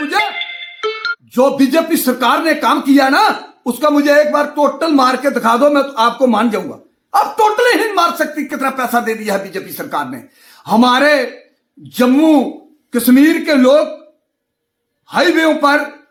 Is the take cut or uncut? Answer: uncut